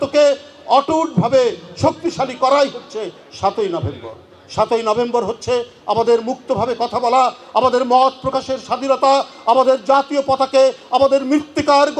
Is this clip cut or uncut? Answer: uncut